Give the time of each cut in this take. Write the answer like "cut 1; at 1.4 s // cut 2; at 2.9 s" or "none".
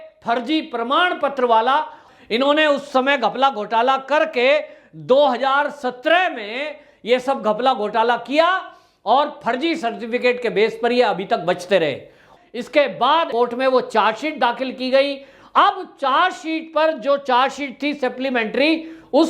cut 1; at 2.0 s // cut 2; at 12.2 s